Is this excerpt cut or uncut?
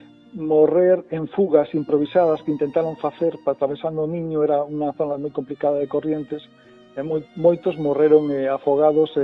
uncut